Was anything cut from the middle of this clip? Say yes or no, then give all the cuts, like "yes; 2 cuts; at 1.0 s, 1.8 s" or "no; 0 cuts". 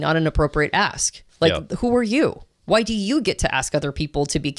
no; 0 cuts